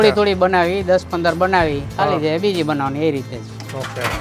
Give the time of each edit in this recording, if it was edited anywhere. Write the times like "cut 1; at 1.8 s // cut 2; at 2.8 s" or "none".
none